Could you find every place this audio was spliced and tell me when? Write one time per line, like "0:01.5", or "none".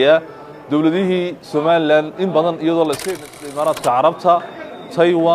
0:03.3